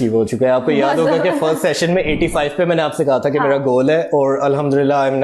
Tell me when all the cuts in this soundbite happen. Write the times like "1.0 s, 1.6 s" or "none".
none